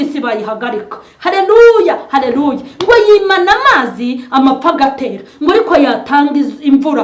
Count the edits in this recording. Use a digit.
0